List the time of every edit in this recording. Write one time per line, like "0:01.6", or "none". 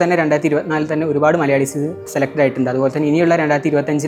none